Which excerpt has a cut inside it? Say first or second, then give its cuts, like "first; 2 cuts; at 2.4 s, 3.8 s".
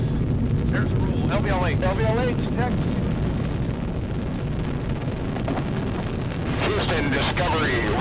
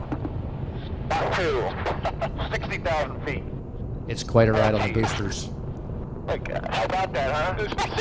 second; 1 cut; at 4.8 s